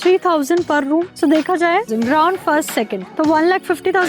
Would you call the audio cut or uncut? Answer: cut